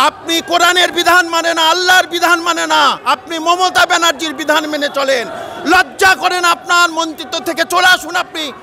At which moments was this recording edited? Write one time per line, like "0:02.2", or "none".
none